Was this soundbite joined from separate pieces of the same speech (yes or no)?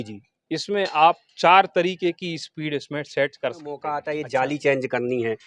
yes